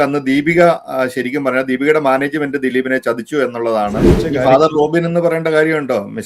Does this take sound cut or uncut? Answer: cut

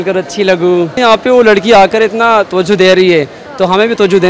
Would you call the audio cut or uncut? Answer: cut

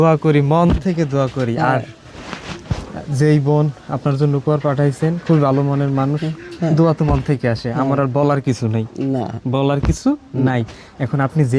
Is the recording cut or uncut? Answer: uncut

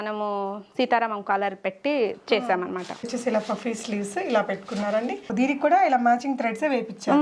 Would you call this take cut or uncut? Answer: cut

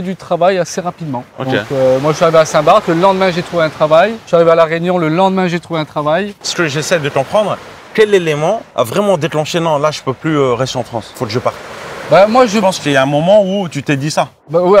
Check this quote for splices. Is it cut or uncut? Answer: uncut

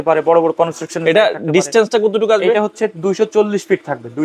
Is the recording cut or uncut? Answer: uncut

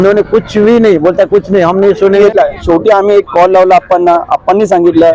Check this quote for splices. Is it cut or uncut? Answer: cut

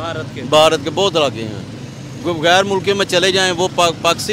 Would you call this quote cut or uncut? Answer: uncut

